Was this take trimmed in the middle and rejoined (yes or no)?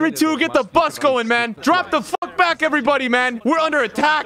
yes